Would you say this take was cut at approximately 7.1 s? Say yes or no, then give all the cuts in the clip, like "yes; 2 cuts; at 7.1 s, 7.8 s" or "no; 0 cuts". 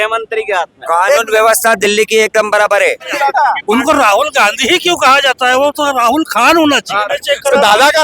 yes; 2 cuts; at 3.1 s, 7.1 s